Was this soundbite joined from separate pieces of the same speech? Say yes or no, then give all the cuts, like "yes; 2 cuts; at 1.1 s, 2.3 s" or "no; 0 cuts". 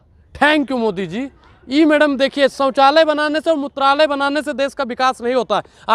no; 0 cuts